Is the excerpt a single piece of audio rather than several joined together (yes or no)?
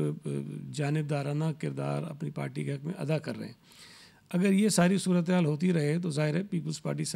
yes